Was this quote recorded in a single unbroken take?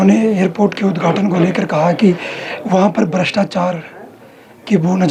yes; 0 cuts

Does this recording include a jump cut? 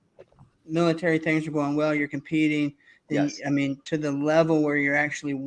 no; 0 cuts

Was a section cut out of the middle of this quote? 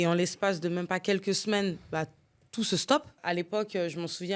yes; 1 cut; at 3.1 s

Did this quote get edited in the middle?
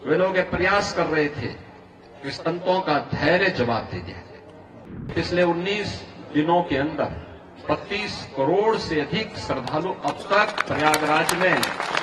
yes; 1 cut; at 4.7 s

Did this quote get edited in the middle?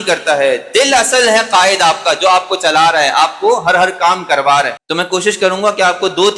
yes; 1 cut; at 4.8 s

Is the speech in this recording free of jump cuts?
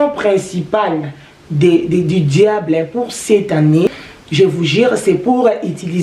no; 1 cut; at 4.1 s

